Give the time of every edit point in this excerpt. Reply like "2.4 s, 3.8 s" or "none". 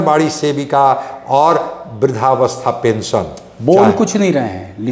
none